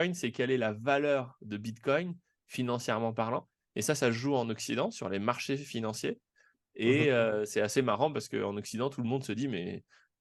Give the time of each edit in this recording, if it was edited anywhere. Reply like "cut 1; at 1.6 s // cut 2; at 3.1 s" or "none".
none